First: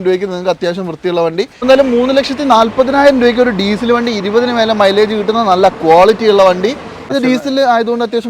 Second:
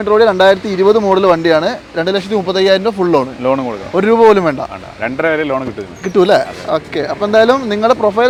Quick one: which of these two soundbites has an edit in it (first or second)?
first